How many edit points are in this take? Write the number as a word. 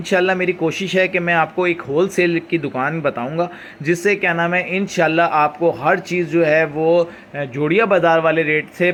zero